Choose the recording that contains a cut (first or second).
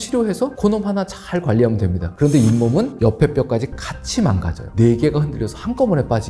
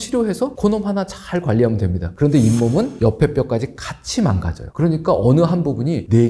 first